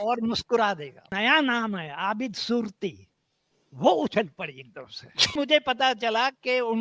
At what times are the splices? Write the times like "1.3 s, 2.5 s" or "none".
1.1 s, 5.3 s